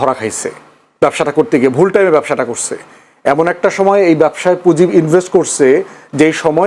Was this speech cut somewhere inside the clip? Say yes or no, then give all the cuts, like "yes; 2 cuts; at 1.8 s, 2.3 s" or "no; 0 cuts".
no; 0 cuts